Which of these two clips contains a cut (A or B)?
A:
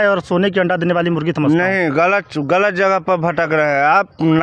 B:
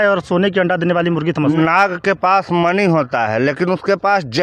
B